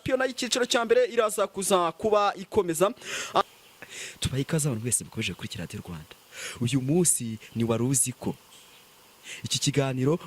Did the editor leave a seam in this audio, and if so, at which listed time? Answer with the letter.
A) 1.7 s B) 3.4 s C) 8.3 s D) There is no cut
B